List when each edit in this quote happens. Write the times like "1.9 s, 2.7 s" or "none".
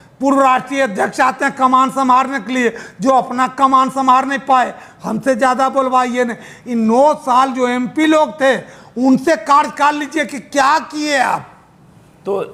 none

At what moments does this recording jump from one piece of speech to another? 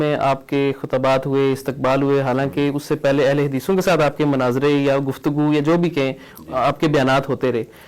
none

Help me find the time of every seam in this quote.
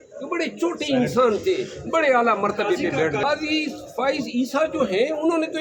3.2 s

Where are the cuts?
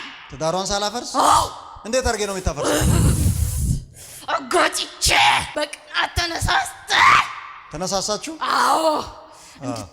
5.5 s

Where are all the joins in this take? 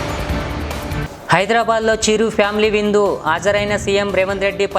1.0 s

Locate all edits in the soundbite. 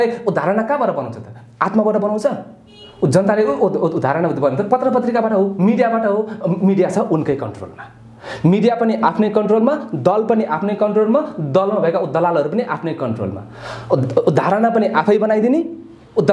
none

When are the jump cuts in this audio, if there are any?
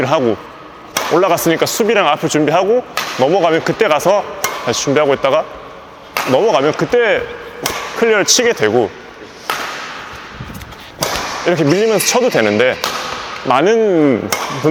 none

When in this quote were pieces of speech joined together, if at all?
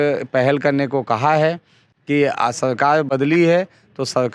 none

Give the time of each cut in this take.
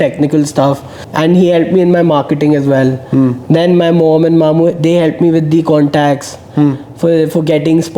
0.9 s

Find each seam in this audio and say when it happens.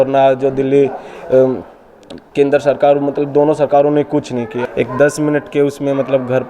4.6 s

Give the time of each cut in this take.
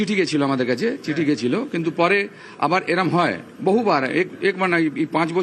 none

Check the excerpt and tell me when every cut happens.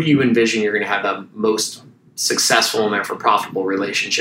1.0 s

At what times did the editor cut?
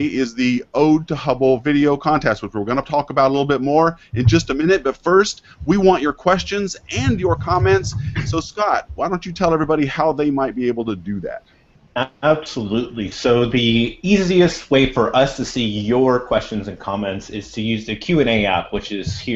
7.5 s

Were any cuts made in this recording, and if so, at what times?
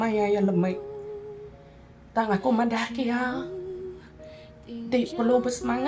3.4 s, 4.9 s

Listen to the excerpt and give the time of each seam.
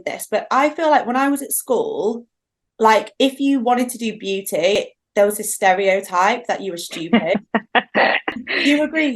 4.8 s, 8.3 s

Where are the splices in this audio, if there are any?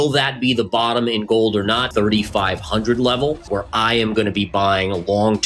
1.9 s, 3.4 s

